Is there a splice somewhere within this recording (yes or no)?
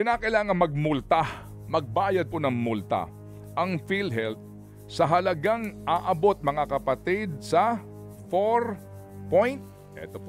no